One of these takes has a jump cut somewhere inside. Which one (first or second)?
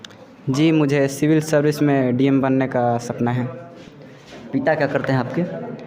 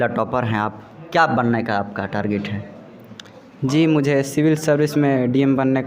first